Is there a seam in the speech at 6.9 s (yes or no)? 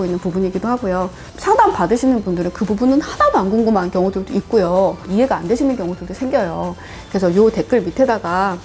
no